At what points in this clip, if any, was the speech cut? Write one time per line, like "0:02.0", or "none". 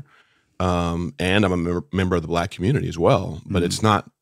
none